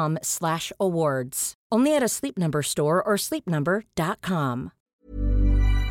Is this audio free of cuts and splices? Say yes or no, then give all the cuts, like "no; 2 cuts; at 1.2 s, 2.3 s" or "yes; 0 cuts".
no; 1 cut; at 4.7 s